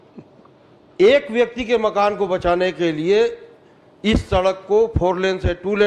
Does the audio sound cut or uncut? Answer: uncut